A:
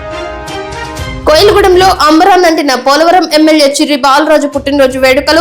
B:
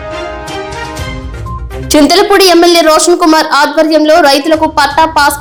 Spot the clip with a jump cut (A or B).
A